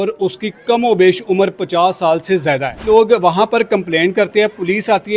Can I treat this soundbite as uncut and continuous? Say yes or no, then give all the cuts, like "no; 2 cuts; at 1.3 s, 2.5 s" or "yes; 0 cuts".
no; 1 cut; at 2.8 s